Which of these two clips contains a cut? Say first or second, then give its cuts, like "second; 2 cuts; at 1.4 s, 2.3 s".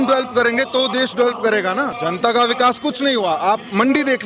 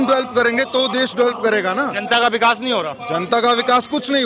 first; 1 cut; at 1.9 s